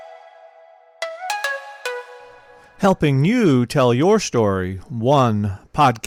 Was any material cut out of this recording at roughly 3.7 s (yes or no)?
no